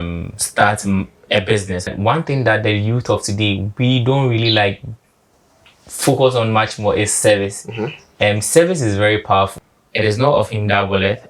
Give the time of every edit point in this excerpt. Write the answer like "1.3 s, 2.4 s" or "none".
1.9 s, 9.6 s